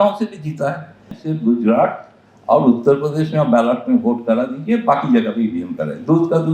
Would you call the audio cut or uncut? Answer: cut